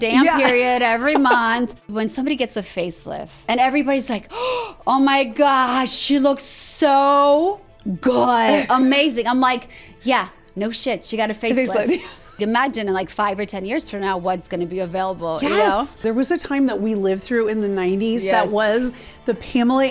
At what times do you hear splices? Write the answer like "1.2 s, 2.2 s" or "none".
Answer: 1.8 s, 3.4 s, 12.4 s, 16.0 s